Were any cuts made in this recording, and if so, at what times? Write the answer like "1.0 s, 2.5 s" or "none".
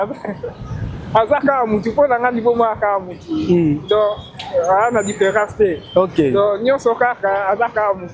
none